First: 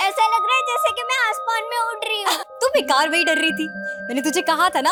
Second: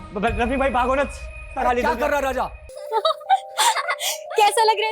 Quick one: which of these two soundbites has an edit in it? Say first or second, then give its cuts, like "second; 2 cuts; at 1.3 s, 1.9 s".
second; 1 cut; at 2.9 s